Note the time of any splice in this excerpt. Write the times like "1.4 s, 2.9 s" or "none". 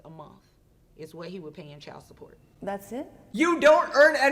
none